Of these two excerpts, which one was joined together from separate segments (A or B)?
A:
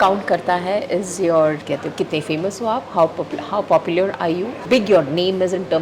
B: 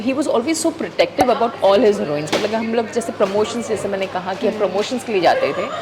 A